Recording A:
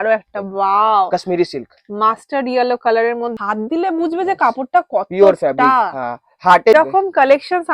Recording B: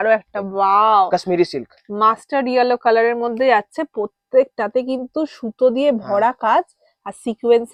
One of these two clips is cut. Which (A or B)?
A